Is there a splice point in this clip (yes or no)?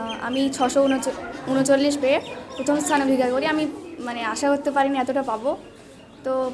no